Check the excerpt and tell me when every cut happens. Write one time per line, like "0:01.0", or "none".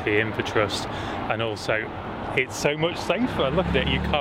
none